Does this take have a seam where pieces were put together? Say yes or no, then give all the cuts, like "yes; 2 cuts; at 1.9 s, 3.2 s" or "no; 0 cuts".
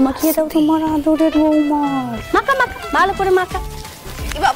yes; 1 cut; at 2.2 s